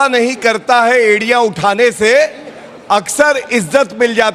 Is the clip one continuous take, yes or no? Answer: yes